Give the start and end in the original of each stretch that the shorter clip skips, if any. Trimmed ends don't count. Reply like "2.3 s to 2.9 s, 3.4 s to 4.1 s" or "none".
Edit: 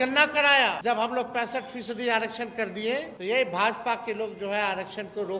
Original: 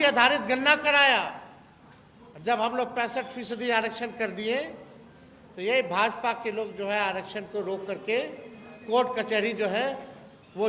1.3 s to 2.4 s, 4.7 s to 5.5 s